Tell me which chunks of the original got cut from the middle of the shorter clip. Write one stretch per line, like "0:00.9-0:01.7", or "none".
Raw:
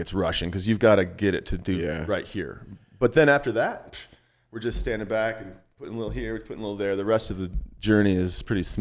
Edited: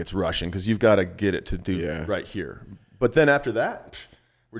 none